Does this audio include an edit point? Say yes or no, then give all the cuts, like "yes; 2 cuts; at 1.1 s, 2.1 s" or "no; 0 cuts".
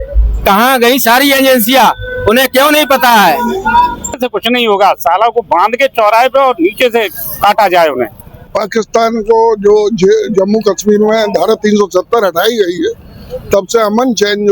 yes; 2 cuts; at 4.2 s, 8.5 s